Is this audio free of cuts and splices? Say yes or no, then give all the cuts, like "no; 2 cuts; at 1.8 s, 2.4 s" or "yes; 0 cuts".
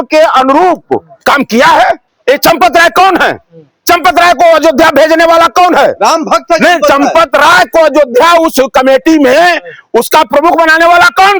no; 1 cut; at 2.1 s